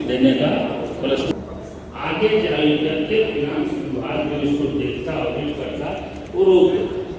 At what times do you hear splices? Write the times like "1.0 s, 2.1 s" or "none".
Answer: none